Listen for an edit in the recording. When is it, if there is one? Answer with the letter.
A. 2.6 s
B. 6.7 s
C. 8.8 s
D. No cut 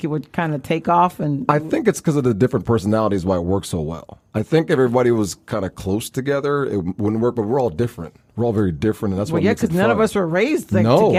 D